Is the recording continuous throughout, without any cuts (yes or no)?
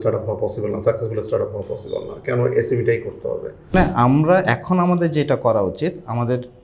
no